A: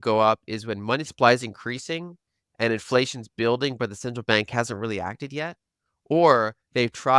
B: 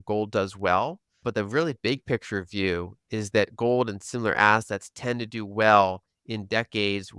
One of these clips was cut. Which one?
B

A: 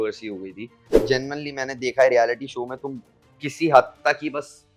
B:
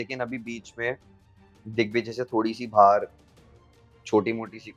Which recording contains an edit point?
A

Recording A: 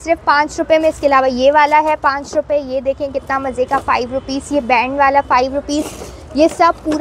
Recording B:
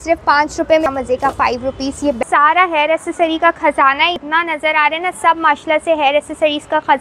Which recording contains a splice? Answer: B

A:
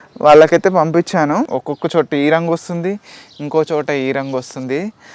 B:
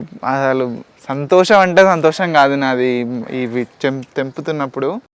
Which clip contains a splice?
A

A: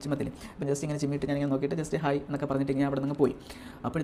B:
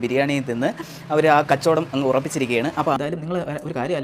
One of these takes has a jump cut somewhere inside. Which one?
B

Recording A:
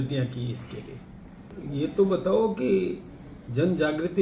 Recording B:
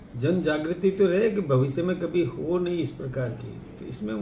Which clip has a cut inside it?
A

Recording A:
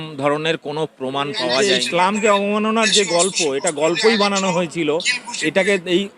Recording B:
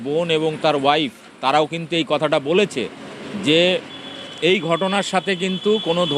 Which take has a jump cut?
A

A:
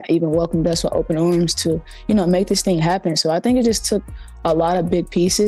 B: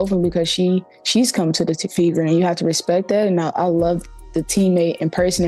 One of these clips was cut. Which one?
B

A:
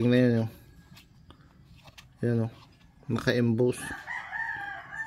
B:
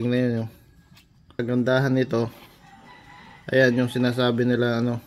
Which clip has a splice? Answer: B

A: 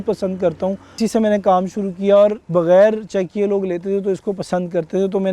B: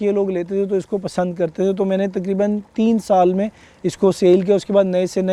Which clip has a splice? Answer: A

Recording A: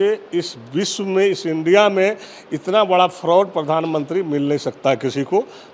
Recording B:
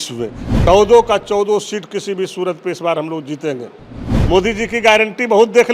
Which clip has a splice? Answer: B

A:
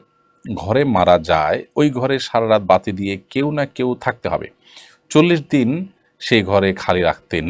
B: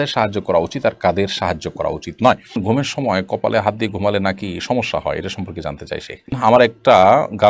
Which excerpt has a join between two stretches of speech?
B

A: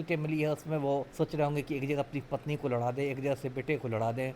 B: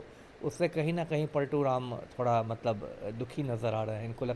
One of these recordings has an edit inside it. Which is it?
A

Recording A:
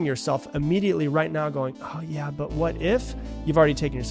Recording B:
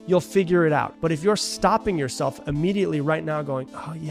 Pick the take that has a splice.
B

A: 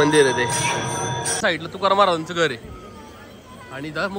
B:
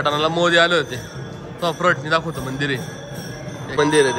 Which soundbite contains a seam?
A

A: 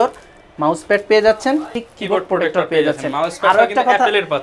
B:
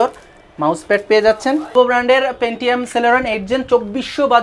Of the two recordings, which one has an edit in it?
B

